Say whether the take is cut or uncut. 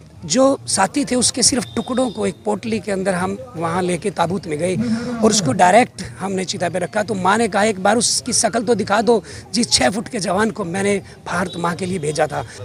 uncut